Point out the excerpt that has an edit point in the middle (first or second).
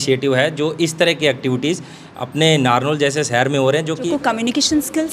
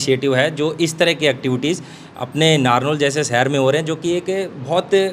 first